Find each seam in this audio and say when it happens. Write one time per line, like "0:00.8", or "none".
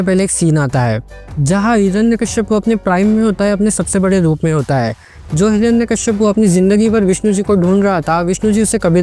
none

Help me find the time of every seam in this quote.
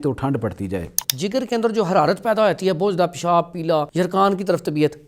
0:01.0
0:03.9

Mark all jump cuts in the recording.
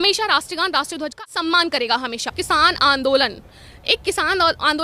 0:02.3

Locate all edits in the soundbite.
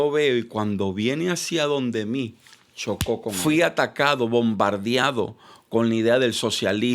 0:03.3

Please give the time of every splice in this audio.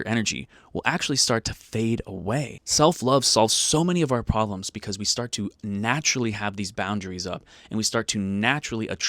0:02.6

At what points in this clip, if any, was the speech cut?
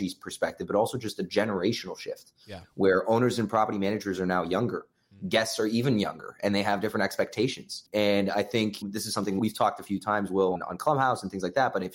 0:07.8
0:09.3
0:10.6

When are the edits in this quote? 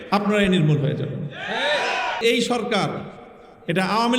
0:02.2

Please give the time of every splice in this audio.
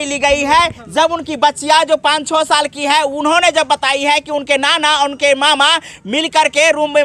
none

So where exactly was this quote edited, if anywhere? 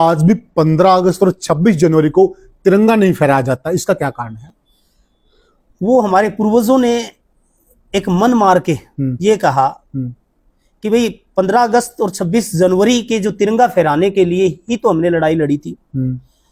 none

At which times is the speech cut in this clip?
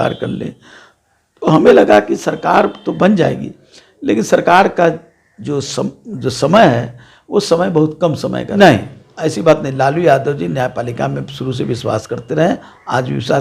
0:08.5

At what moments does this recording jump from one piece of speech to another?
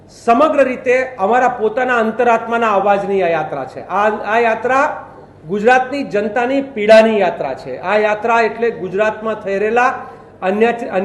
none

